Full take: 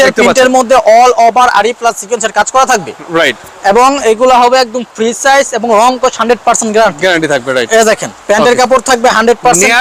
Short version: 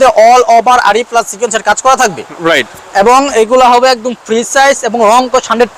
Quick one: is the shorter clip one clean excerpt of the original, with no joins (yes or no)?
yes